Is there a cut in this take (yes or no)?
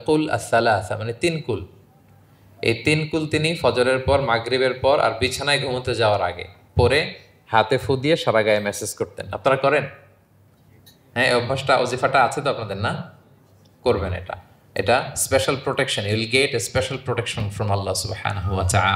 no